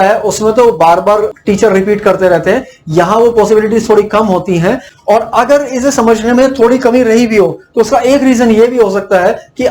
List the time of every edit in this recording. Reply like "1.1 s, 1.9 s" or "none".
1.4 s, 4.9 s